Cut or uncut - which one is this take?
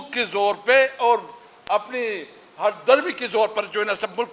uncut